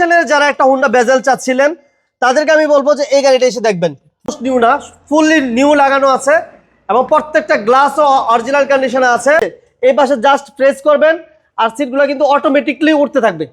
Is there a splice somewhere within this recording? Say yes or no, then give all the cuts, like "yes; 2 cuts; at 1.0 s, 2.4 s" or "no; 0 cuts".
yes; 2 cuts; at 4.4 s, 9.6 s